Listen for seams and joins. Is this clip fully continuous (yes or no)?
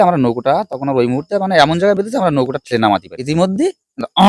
no